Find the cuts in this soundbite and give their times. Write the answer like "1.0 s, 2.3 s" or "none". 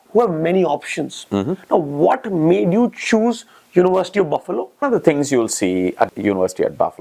4.8 s, 6.1 s

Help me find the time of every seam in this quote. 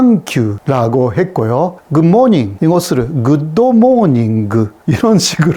none

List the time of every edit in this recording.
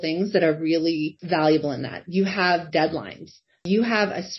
1.2 s, 3.6 s

